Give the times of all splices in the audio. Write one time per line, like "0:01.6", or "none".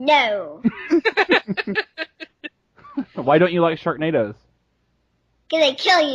none